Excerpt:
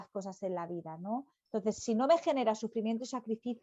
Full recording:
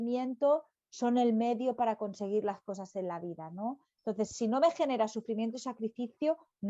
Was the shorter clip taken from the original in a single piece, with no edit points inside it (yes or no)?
yes